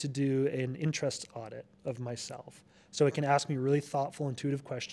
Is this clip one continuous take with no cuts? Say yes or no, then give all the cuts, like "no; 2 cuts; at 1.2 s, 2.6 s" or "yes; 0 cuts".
yes; 0 cuts